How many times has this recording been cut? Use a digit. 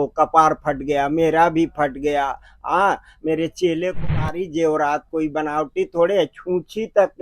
1